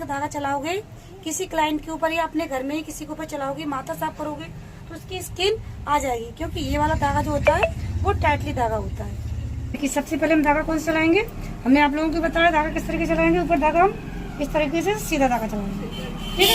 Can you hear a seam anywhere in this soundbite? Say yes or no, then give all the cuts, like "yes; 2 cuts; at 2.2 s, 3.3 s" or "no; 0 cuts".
yes; 1 cut; at 9.8 s